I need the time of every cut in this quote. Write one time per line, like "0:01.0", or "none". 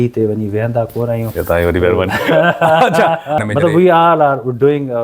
0:03.4